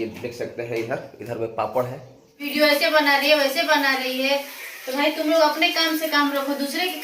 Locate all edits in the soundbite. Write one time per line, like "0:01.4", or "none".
0:02.4